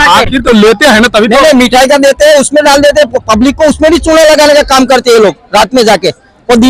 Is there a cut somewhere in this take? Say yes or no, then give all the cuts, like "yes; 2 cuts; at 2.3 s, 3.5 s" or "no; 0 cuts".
no; 0 cuts